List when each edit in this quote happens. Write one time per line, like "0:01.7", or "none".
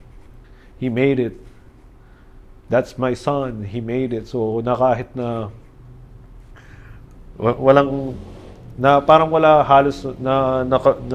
none